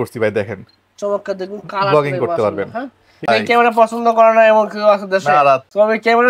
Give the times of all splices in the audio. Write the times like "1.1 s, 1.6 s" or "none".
3.3 s